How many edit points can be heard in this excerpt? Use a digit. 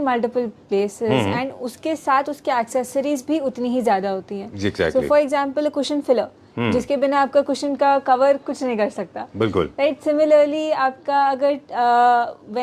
0